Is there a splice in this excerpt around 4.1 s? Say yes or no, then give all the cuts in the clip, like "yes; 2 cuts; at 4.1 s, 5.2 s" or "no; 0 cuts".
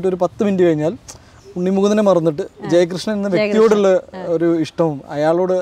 no; 0 cuts